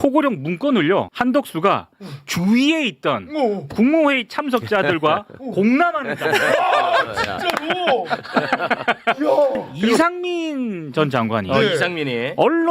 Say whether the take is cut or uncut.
cut